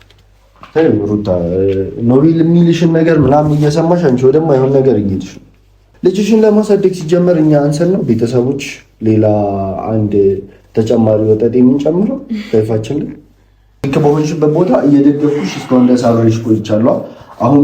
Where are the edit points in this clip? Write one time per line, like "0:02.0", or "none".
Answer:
0:05.8
0:13.9

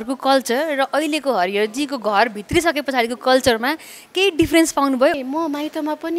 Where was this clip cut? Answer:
0:05.2

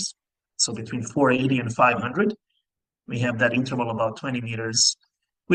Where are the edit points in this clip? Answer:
none

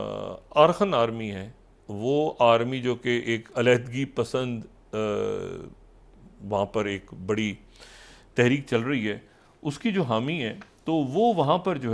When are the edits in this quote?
none

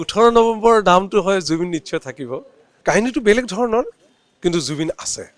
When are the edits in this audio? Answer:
0:02.7

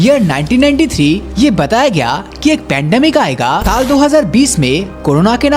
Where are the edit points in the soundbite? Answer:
0:01.3
0:03.7

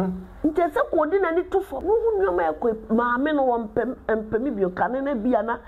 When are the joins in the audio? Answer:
0:01.7

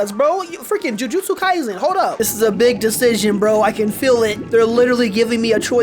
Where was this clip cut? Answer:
0:02.2
0:04.4

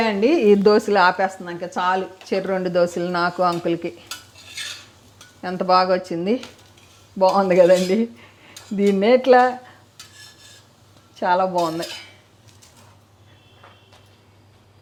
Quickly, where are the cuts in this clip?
none

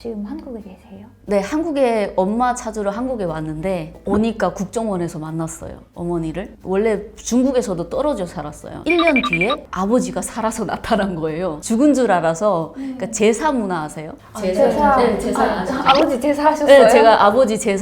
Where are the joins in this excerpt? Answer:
none

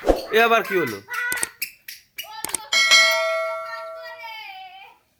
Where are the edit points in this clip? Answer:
none

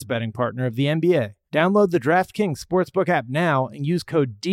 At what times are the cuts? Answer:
0:01.4

